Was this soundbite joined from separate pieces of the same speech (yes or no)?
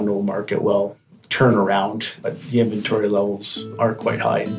no